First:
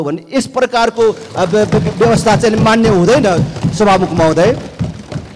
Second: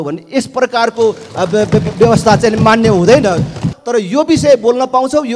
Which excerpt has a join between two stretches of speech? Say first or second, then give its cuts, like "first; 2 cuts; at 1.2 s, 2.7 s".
second; 1 cut; at 3.7 s